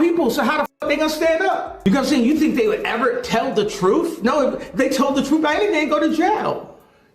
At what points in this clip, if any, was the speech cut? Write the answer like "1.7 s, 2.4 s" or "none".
1.8 s

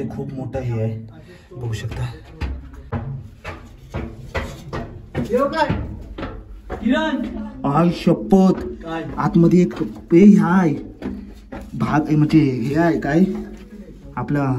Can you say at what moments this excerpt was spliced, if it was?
2.8 s

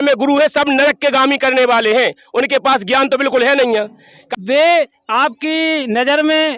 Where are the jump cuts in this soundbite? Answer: 4.2 s

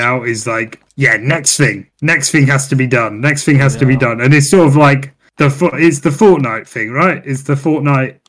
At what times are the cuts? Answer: none

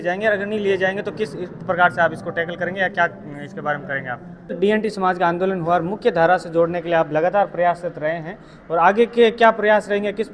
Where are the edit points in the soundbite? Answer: 4.6 s

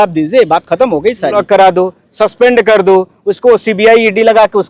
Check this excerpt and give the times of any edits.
1.3 s

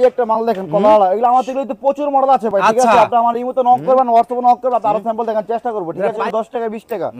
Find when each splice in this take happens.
6.2 s

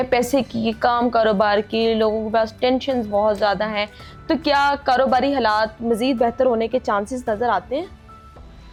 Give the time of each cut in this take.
none

